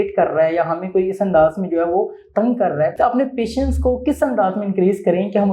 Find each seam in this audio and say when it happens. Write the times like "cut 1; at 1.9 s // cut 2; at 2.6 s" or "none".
cut 1; at 2.9 s